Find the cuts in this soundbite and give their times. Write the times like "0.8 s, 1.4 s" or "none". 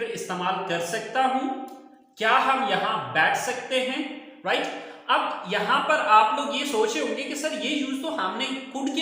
none